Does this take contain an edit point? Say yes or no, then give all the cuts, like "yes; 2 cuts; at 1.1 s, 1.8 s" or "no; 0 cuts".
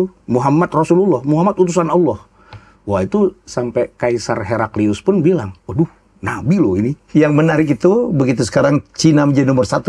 yes; 1 cut; at 7.0 s